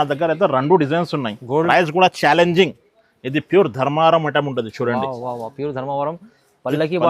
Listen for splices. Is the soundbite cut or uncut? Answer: cut